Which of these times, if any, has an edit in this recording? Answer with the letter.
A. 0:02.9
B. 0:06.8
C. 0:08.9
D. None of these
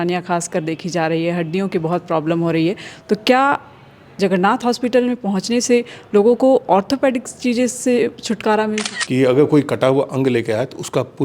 C